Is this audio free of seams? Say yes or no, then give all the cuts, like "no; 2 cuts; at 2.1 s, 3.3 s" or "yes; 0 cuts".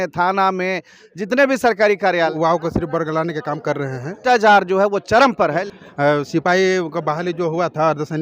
no; 3 cuts; at 2.3 s, 4.2 s, 5.6 s